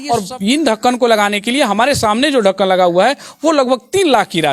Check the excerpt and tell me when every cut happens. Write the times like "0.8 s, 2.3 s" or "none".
none